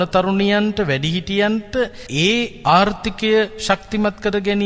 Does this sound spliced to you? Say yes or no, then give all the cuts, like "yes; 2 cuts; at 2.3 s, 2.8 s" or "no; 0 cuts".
yes; 1 cut; at 2.3 s